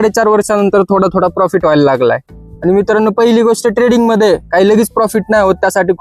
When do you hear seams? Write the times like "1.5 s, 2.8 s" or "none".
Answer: none